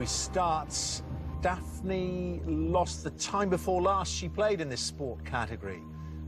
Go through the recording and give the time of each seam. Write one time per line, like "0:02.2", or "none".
0:02.4